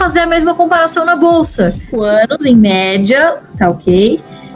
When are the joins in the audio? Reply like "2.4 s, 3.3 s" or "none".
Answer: 1.9 s